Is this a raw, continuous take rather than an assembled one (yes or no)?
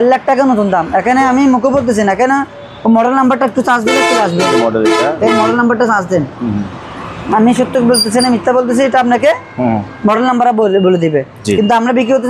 yes